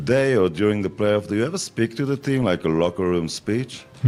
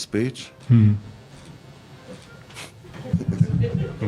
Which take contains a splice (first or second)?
second